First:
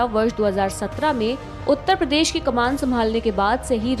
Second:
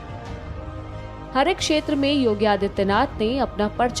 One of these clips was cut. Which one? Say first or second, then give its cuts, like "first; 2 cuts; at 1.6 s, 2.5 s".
second; 1 cut; at 1.3 s